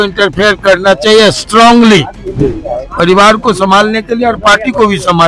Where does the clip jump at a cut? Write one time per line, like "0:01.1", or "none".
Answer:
none